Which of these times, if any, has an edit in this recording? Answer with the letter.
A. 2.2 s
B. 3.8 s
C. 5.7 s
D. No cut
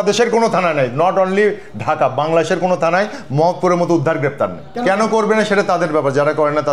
D